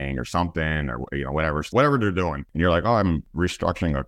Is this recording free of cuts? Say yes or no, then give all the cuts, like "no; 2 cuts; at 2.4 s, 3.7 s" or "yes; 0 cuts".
no; 3 cuts; at 1.7 s, 2.4 s, 3.2 s